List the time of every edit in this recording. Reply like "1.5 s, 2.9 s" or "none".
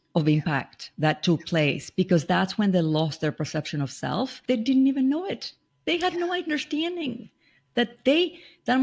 4.4 s

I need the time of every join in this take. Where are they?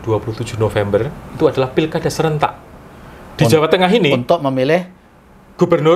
none

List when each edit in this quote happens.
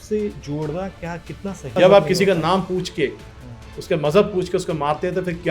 1.8 s

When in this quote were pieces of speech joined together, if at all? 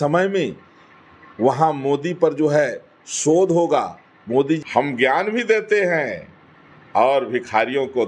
4.6 s

